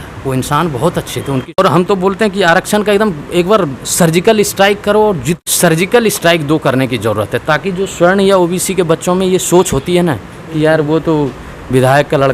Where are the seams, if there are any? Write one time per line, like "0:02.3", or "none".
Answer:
0:01.5
0:05.4